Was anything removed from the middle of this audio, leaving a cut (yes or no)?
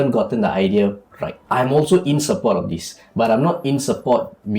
yes